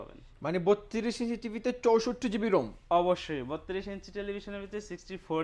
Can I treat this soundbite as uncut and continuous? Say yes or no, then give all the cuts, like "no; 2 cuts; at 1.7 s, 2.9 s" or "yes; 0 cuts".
yes; 0 cuts